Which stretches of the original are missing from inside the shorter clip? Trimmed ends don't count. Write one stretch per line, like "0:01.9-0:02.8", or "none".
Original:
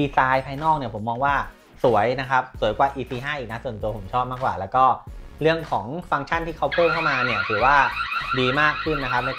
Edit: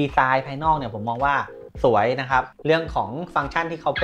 0:02.5-0:05.3